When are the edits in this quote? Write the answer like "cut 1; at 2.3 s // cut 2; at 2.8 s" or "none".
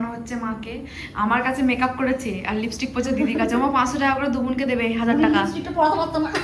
none